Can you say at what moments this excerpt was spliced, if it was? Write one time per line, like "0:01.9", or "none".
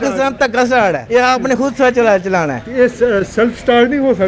0:01.0